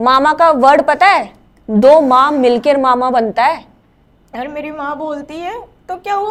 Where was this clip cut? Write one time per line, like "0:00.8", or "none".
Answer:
none